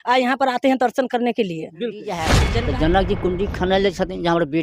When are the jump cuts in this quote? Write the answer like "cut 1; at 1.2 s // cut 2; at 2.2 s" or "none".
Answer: cut 1; at 2.4 s